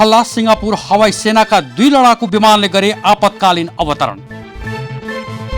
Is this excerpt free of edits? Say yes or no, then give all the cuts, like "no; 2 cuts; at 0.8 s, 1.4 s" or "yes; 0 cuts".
no; 1 cut; at 4.5 s